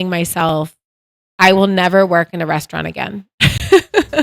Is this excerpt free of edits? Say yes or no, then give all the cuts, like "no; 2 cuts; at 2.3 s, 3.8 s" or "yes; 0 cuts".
yes; 0 cuts